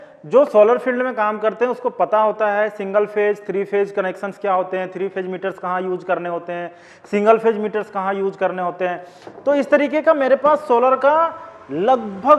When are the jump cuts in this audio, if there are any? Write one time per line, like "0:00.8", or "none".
none

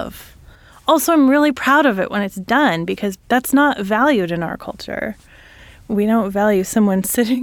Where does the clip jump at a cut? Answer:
0:03.2
0:05.8

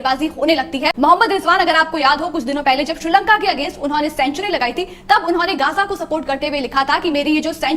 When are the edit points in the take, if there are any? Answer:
0:00.9

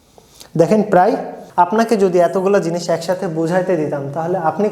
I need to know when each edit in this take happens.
0:01.4

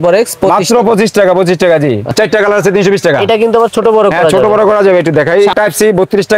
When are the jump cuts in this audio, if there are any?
0:02.1
0:05.5

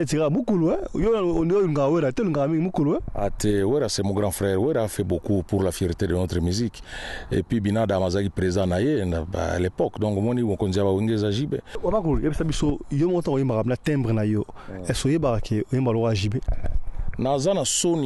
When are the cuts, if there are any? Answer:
0:11.7

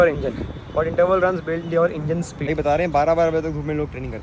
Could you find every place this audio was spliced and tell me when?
0:02.3

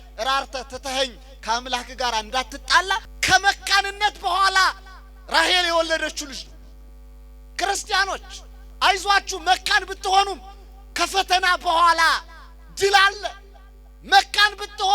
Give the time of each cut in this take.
0:03.1

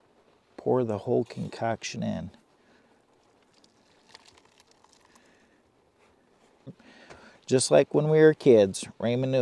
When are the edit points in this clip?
none

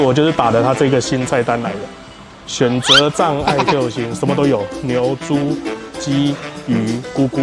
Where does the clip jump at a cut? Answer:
none

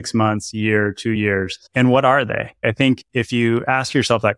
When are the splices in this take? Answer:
0:01.2
0:02.6

